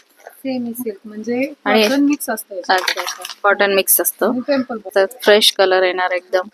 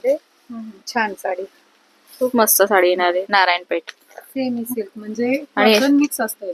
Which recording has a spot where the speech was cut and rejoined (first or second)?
first